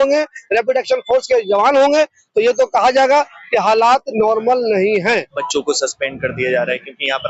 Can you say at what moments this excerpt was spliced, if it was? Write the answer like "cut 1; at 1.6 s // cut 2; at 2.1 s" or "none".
cut 1; at 5.3 s